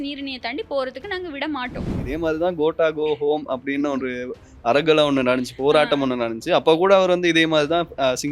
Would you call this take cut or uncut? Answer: cut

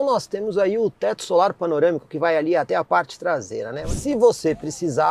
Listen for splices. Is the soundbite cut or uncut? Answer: cut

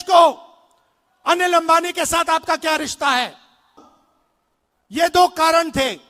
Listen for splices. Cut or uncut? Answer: cut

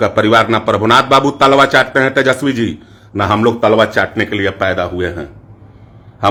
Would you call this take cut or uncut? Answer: uncut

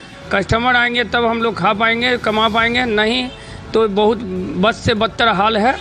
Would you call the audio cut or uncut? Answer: uncut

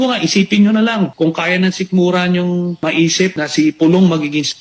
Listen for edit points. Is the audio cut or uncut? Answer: cut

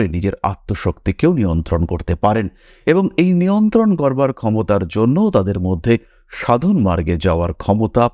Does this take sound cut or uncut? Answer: uncut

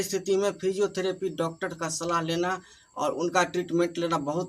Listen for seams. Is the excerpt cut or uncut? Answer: uncut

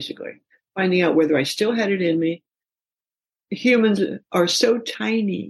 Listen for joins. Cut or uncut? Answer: cut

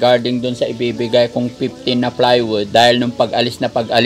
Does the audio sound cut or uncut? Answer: cut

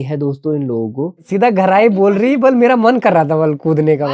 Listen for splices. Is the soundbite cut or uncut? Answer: cut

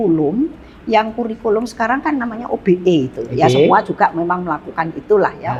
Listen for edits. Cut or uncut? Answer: uncut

